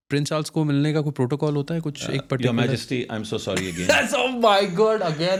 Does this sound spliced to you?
no; 0 cuts

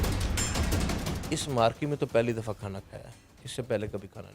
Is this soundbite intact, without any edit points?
no; 1 cut; at 1.2 s

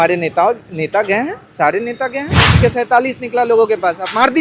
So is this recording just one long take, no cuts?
no; 1 cut; at 2.6 s

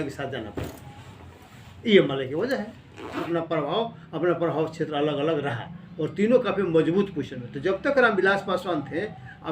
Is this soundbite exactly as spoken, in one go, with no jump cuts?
no; 1 cut; at 3.3 s

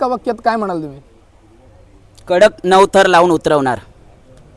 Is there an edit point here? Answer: no; 0 cuts

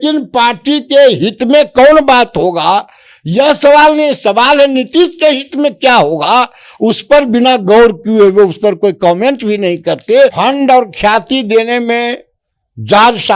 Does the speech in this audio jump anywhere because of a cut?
yes; 1 cut; at 10.3 s

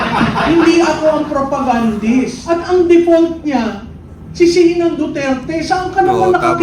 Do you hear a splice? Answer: yes; 1 cut; at 2.4 s

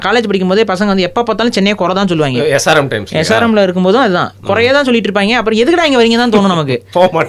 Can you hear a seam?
no; 0 cuts

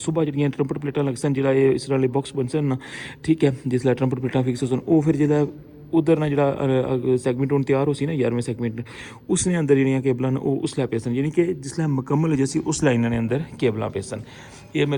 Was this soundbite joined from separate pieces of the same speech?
no; 0 cuts

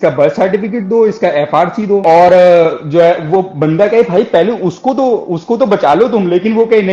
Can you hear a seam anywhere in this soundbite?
no; 0 cuts

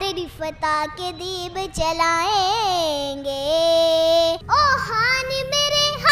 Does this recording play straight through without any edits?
no; 1 cut; at 4.4 s

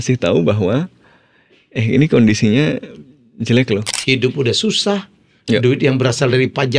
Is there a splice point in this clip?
yes; 1 cut; at 3.9 s

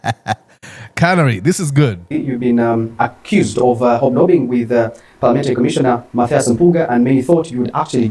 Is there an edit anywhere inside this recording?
no; 0 cuts

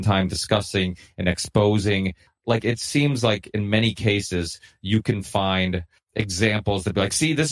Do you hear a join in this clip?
yes; 2 cuts; at 2.3 s, 6.0 s

